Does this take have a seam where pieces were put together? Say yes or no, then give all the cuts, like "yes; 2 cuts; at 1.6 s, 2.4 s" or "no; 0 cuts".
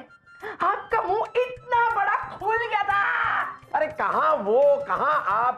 yes; 1 cut; at 3.6 s